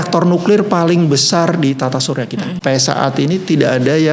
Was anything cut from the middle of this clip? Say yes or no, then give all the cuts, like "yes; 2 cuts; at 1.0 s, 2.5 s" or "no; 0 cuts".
yes; 1 cut; at 2.6 s